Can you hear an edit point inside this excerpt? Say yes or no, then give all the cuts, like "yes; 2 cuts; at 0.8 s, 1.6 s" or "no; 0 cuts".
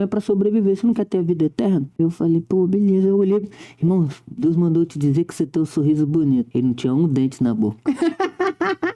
yes; 2 cuts; at 1.9 s, 6.5 s